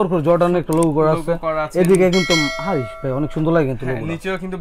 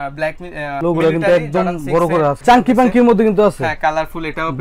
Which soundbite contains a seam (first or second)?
second